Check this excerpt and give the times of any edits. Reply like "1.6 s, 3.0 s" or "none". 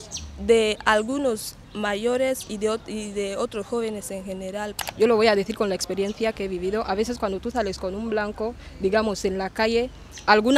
4.8 s